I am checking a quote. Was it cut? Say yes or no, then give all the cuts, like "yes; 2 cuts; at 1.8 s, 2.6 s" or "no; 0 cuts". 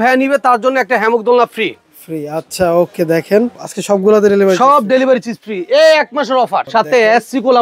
yes; 2 cuts; at 3.7 s, 6.6 s